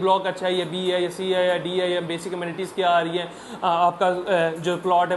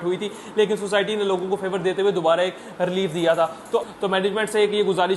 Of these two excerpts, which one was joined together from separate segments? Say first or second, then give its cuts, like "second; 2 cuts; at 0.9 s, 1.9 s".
second; 1 cut; at 3.9 s